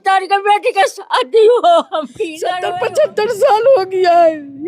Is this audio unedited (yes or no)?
no